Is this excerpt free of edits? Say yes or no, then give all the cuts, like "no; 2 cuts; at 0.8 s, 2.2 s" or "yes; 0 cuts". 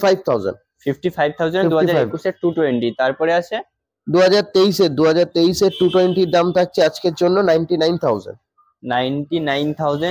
yes; 0 cuts